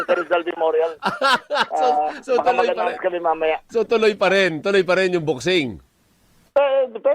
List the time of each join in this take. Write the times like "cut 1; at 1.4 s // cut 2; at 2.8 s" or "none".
cut 1; at 3.7 s

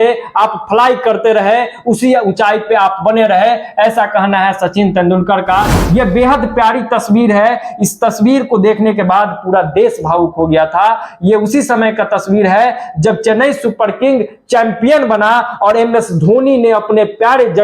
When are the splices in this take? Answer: cut 1; at 5.8 s

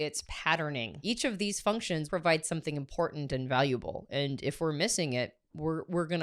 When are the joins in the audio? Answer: cut 1; at 1.0 s // cut 2; at 2.1 s

